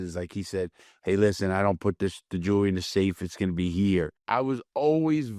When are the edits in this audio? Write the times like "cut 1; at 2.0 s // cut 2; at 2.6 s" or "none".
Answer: cut 1; at 4.2 s